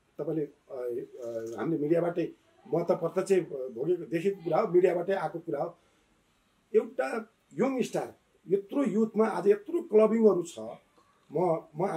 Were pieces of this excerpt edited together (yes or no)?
no